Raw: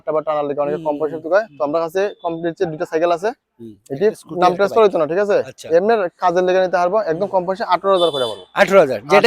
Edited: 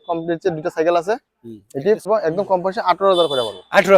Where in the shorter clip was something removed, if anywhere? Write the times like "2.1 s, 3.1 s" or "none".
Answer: 2.1 s